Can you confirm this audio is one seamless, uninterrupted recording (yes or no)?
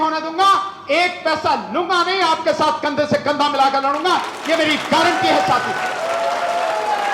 yes